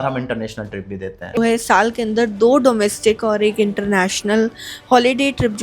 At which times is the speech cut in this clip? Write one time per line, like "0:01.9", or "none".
0:01.4